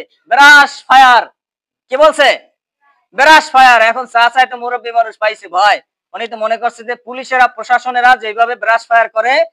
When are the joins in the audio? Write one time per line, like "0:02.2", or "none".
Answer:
none